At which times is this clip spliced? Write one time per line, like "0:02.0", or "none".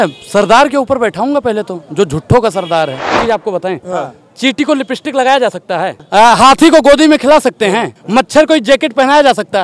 0:03.2
0:06.0
0:08.0